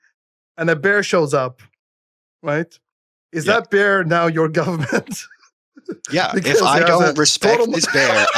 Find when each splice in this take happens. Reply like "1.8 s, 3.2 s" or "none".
none